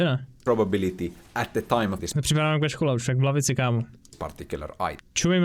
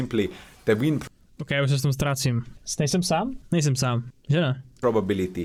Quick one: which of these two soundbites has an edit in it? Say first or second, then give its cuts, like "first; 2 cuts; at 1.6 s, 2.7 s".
first; 1 cut; at 2.0 s